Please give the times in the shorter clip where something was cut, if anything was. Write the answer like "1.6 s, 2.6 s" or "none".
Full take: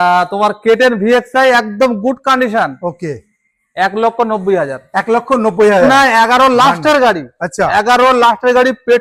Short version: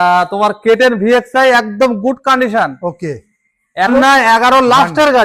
3.9 s

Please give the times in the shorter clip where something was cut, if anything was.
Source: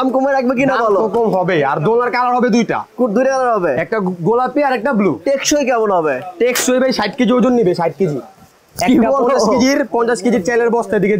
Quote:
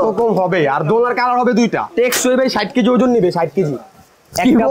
1.9 s

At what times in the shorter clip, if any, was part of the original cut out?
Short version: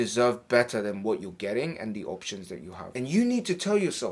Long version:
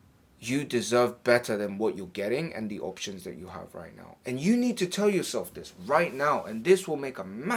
2.8 s

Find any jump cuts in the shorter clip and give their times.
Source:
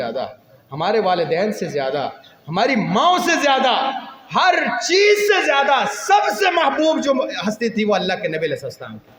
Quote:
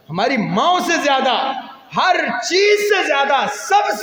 none

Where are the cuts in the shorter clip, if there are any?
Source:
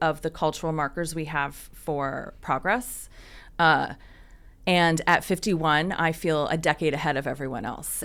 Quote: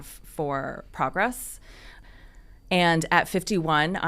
2.0 s

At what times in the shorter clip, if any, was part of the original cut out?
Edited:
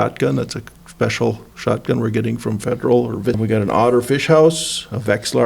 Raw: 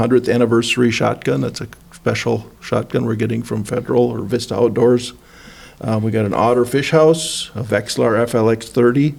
3.4 s

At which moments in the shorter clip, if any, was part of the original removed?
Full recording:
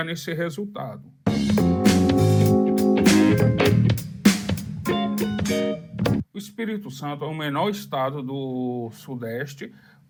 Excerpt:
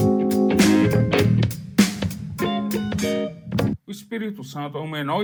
none

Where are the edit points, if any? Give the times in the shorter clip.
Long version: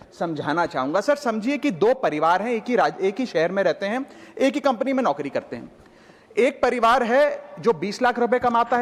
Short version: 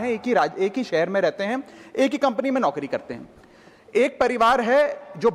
none

